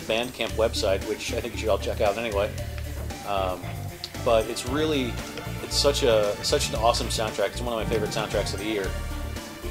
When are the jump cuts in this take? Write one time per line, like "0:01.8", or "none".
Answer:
0:07.5